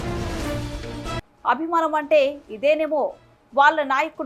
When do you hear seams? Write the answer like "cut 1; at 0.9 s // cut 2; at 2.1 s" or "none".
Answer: none